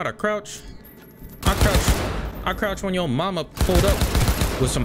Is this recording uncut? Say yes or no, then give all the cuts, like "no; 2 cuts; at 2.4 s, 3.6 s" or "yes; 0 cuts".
yes; 0 cuts